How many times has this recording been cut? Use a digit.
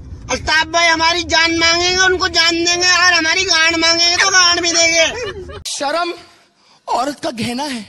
1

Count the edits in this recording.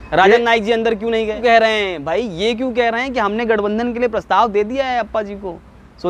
1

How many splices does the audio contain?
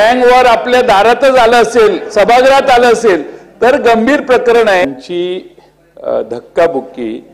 1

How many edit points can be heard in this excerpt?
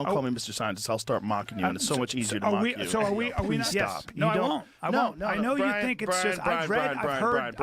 1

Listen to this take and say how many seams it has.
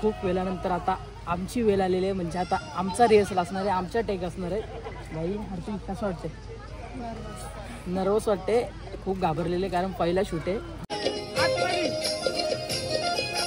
1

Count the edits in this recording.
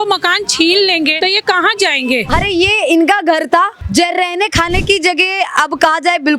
3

